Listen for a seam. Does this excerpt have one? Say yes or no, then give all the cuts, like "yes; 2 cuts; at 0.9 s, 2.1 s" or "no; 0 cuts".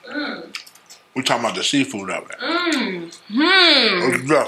no; 0 cuts